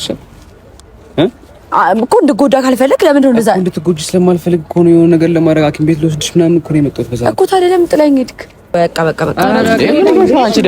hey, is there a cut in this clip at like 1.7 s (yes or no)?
no